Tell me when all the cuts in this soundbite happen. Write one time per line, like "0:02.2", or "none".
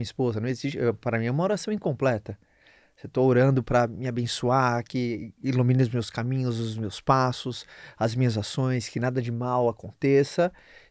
none